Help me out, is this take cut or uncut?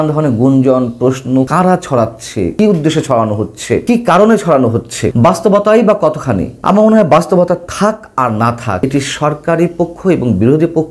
cut